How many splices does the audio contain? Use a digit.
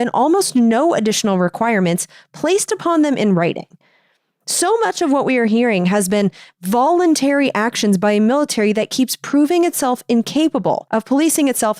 1